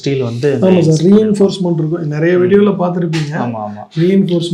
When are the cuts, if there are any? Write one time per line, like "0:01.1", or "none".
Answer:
none